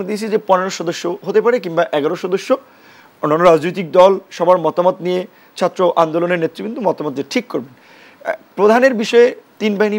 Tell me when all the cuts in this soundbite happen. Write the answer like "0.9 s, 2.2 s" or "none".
none